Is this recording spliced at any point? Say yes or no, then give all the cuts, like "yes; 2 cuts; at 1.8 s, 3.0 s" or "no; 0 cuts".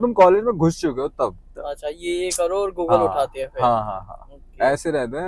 no; 0 cuts